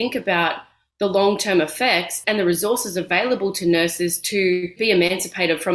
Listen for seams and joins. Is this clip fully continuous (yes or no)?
no